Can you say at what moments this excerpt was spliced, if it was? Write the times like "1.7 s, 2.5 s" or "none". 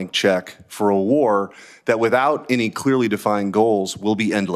none